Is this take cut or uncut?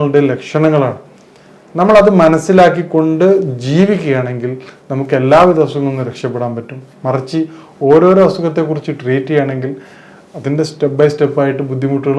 uncut